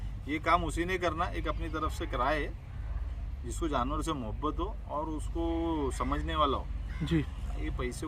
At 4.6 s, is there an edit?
no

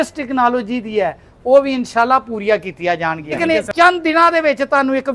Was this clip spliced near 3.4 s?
yes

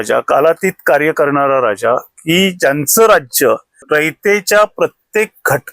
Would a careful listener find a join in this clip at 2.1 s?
no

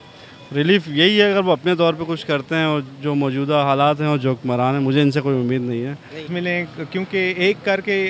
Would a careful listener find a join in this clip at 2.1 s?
no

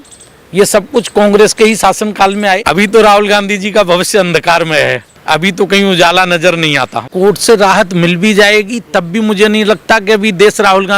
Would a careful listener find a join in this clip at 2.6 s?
yes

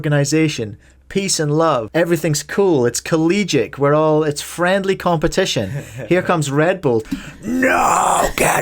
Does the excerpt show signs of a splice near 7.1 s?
yes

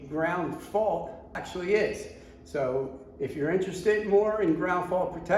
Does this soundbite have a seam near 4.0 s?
no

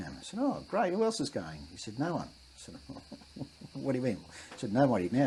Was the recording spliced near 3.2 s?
no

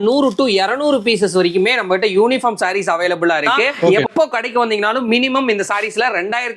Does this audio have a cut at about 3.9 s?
yes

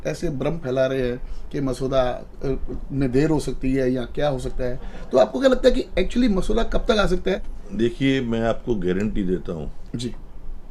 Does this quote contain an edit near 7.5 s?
yes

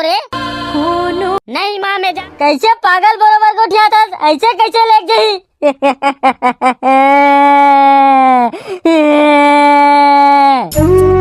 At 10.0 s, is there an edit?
no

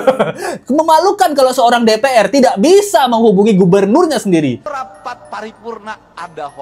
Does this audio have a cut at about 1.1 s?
no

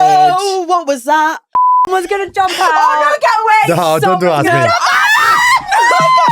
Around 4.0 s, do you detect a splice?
no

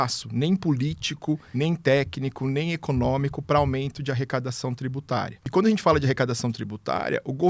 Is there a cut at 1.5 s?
yes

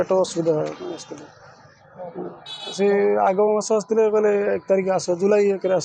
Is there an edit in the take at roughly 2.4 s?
no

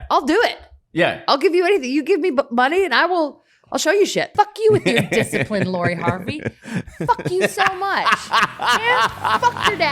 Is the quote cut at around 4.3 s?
yes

